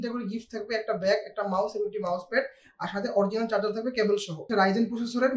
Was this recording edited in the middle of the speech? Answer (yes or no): yes